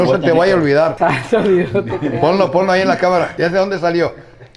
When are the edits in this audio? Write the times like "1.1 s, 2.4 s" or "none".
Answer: 0.9 s, 3.3 s